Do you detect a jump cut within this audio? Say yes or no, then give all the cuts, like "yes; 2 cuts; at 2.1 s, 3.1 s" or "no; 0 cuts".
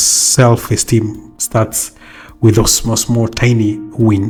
no; 0 cuts